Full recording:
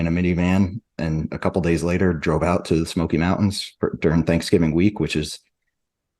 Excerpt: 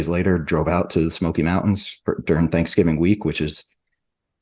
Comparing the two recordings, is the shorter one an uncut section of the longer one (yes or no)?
yes